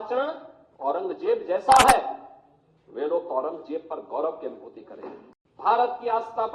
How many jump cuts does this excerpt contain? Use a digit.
1